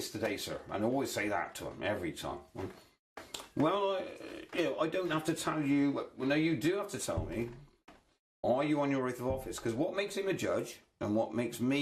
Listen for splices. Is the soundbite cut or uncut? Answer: cut